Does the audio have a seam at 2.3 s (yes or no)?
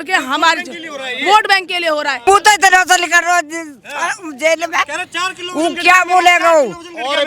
yes